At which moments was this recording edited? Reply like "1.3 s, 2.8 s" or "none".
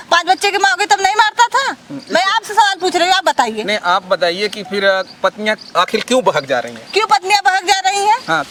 none